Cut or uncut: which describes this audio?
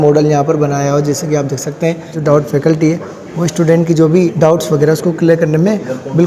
cut